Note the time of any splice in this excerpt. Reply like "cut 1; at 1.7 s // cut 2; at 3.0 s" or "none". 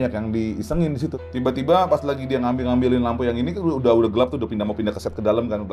cut 1; at 1.2 s